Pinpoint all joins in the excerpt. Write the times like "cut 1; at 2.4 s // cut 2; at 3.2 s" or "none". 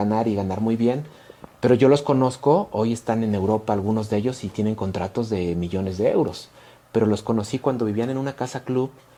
none